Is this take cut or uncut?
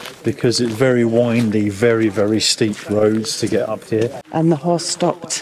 cut